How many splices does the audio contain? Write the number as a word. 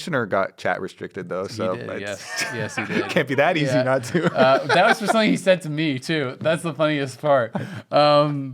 zero